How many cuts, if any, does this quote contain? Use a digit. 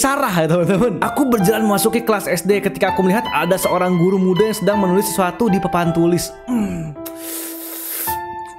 1